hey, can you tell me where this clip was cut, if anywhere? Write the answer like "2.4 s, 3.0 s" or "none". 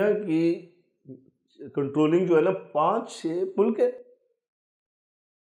none